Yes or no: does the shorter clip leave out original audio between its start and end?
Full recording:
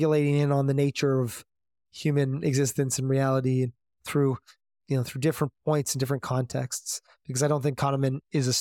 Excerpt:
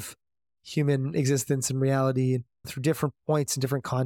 yes